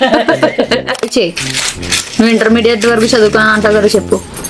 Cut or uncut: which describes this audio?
cut